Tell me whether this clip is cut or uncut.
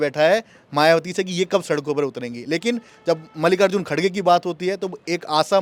uncut